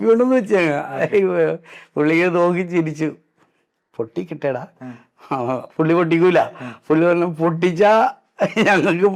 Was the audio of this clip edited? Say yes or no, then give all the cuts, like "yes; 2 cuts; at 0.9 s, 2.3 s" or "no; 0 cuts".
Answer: no; 0 cuts